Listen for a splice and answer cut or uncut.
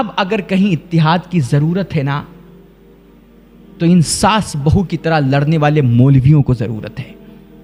uncut